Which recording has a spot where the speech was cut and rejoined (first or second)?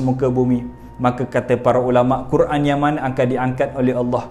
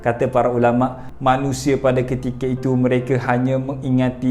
second